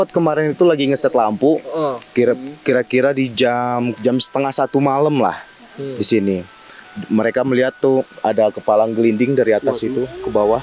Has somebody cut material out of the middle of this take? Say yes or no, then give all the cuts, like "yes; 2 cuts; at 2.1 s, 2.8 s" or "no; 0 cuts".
yes; 1 cut; at 3.9 s